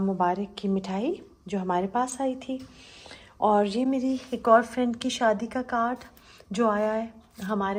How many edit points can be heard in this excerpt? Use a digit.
0